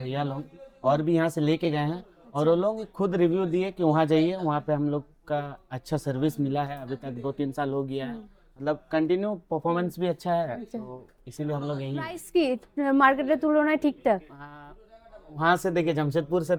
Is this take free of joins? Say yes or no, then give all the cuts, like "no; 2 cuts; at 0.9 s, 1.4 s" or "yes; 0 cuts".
yes; 0 cuts